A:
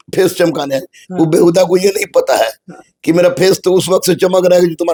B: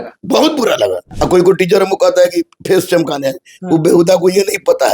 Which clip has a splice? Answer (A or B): B